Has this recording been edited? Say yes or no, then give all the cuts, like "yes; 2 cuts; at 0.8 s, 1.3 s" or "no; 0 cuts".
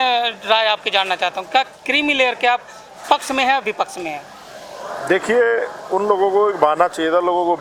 no; 0 cuts